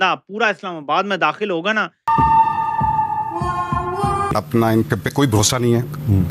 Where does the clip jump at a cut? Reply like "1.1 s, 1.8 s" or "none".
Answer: 2.1 s